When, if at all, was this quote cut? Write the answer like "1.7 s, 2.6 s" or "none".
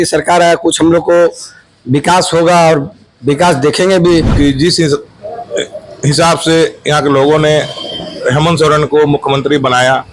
4.3 s